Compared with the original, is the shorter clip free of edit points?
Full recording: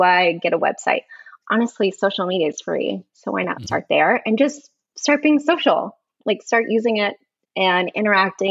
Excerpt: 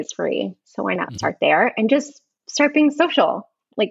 yes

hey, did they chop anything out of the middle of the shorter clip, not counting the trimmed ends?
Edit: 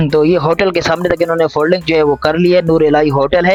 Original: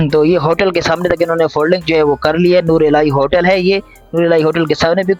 no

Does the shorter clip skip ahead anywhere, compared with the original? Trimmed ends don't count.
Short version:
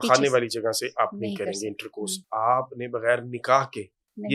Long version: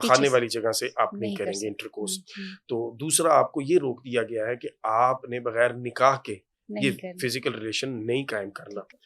yes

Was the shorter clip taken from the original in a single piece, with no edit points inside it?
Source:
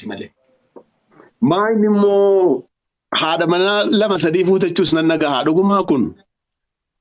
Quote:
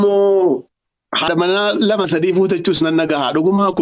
no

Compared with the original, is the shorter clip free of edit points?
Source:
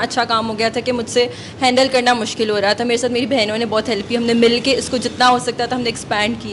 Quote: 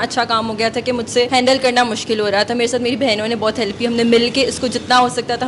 no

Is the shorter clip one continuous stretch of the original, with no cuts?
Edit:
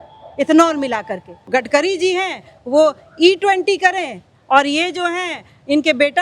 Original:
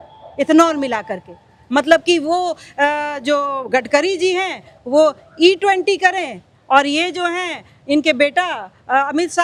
no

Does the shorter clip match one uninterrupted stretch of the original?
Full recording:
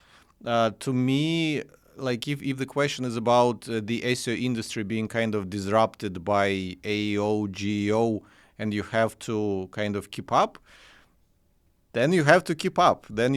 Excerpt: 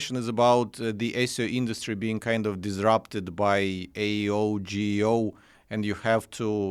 yes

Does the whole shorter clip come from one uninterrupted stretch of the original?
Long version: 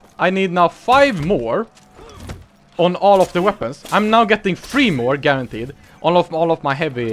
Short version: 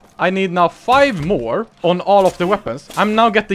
no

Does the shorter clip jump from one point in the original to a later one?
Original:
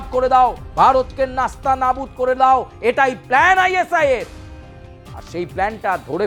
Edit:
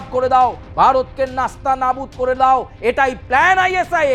no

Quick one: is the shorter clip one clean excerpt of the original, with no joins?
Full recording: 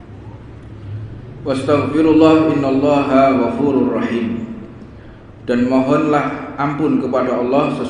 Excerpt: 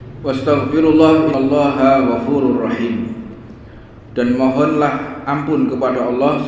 no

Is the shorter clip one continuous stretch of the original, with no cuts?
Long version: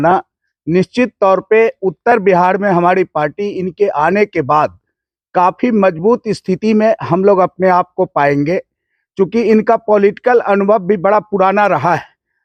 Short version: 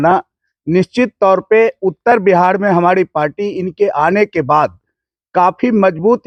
yes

